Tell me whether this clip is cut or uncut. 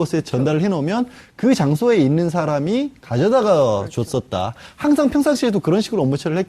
cut